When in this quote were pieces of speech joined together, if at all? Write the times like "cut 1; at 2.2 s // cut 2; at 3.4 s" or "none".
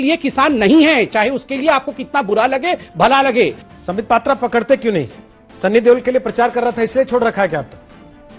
none